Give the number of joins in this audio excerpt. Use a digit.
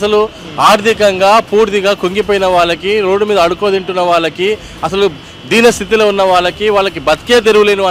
0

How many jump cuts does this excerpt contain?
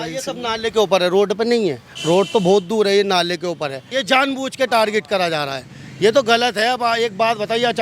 1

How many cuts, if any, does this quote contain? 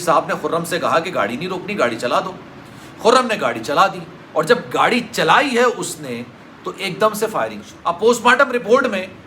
1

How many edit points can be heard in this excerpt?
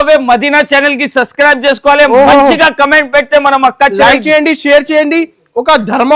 0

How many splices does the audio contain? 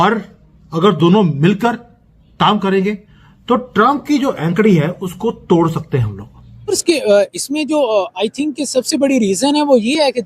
1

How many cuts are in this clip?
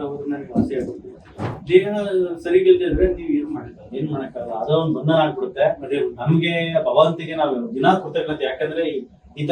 1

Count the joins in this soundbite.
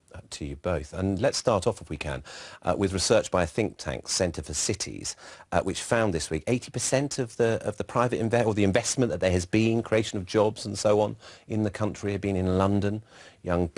1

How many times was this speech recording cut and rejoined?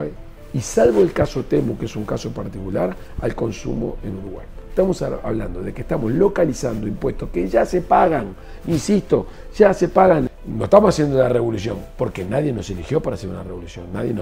1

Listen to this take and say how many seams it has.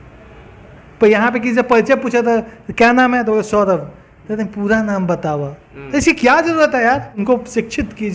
1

